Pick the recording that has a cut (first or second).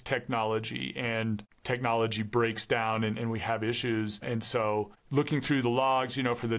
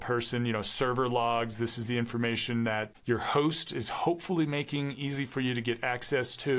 first